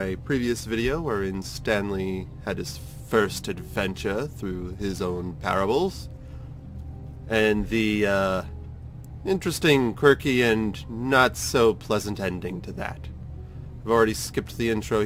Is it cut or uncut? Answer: uncut